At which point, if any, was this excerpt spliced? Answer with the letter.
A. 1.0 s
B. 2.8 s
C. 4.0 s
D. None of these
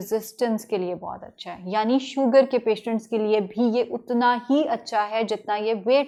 D